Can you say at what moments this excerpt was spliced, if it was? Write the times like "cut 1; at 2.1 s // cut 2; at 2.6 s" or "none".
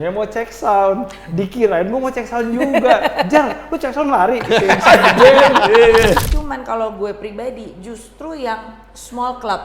cut 1; at 6.3 s